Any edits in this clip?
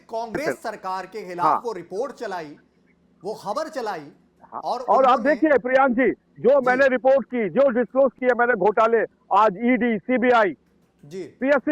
no; 0 cuts

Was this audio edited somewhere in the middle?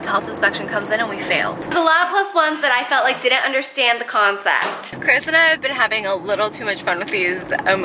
yes; 2 cuts; at 1.7 s, 4.9 s

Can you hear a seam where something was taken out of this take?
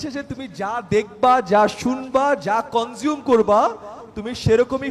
no; 0 cuts

